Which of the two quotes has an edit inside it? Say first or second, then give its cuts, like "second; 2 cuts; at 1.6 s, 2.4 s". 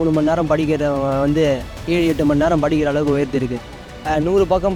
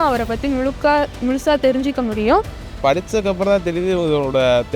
second; 1 cut; at 2.8 s